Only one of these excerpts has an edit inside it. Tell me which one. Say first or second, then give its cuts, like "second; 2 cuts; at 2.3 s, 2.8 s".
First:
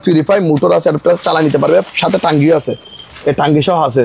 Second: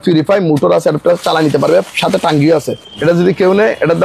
second; 1 cut; at 2.9 s